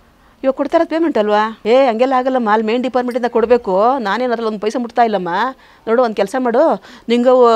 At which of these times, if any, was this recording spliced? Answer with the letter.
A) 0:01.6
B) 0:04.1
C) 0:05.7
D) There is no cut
A